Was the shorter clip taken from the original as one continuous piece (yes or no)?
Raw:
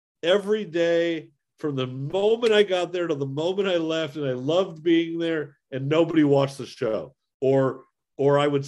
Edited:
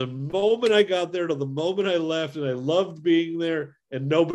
yes